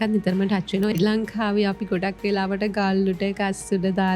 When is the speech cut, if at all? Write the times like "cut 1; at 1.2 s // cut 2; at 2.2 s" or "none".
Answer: cut 1; at 0.9 s